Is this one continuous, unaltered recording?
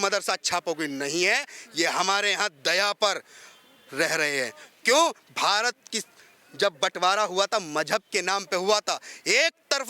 yes; 0 cuts

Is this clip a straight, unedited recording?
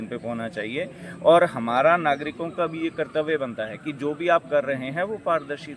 yes; 0 cuts

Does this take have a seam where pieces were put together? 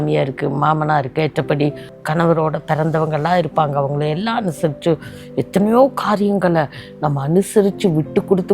yes; 1 cut; at 1.9 s

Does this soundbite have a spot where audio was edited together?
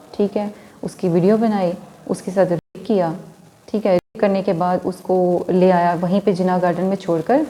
no; 0 cuts

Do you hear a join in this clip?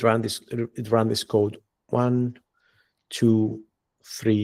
no; 0 cuts

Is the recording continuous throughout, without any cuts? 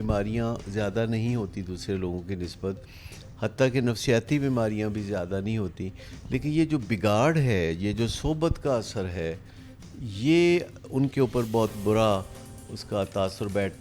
yes; 0 cuts

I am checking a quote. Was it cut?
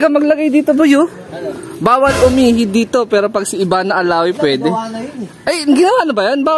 no; 0 cuts

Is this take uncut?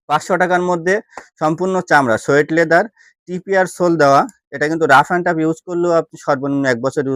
yes; 0 cuts

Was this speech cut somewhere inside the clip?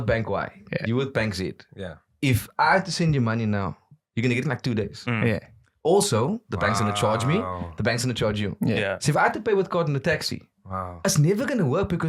no; 0 cuts

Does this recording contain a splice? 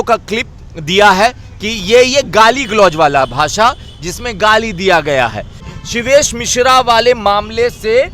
yes; 1 cut; at 5.7 s

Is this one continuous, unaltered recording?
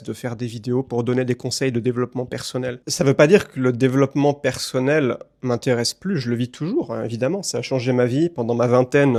yes; 0 cuts

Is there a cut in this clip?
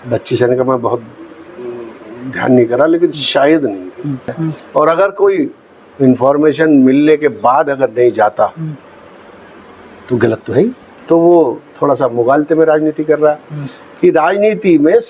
yes; 2 cuts; at 4.3 s, 10.8 s

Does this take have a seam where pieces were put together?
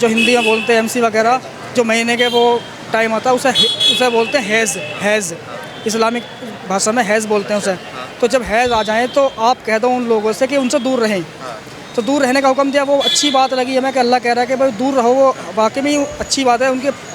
no; 0 cuts

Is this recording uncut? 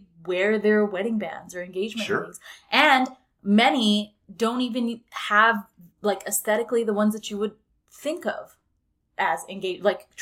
yes; 0 cuts

